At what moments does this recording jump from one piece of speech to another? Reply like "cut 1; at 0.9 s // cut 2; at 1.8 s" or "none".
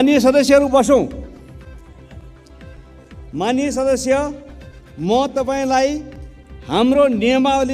cut 1; at 1.4 s // cut 2; at 3.3 s